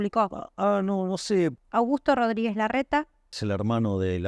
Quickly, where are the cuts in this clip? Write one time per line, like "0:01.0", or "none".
0:01.6
0:03.3

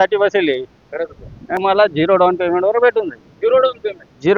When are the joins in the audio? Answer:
0:01.5

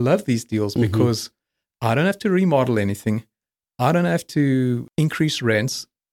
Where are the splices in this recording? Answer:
none

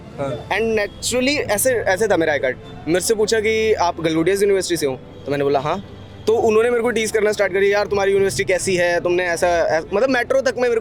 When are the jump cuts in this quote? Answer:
none

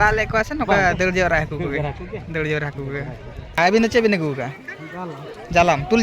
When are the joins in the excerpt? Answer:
0:03.6

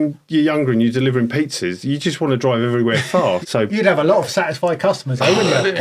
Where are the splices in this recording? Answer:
0:03.4

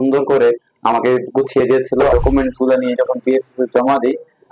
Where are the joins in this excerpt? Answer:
0:02.1

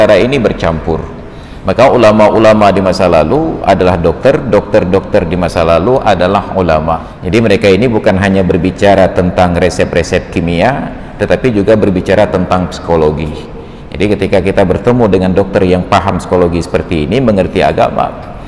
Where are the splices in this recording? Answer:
0:07.1

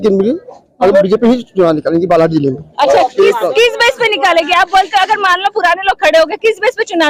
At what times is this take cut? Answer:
none

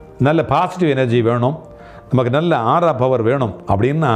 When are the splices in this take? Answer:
none

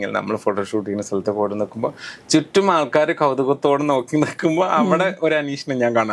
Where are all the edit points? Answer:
none

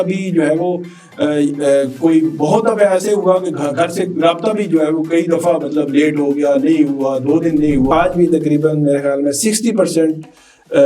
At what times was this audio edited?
0:07.9

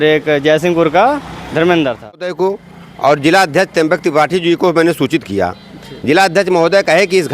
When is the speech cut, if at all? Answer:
0:02.3

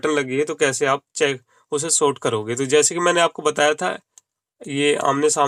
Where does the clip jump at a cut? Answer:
none

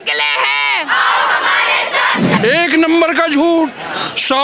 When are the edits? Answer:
0:02.4

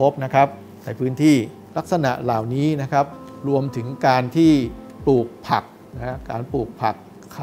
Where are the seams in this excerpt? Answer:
none

